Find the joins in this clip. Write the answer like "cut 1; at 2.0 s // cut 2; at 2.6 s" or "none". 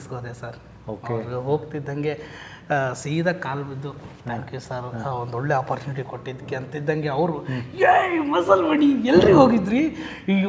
none